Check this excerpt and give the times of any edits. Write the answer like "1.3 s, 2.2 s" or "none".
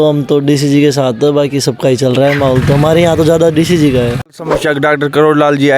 4.3 s